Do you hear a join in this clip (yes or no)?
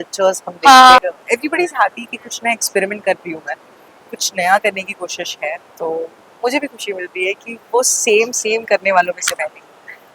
yes